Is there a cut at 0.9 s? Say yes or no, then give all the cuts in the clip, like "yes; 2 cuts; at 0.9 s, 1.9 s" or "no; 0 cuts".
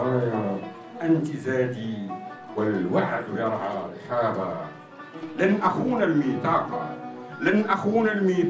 no; 0 cuts